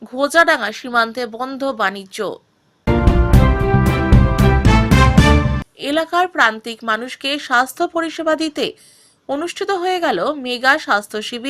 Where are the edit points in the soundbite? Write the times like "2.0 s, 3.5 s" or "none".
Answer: 2.7 s, 5.6 s